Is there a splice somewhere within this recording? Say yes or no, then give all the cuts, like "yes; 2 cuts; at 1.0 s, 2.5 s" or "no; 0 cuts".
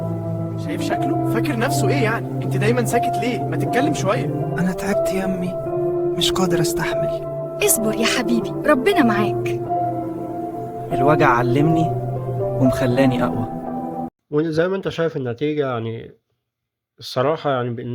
no; 0 cuts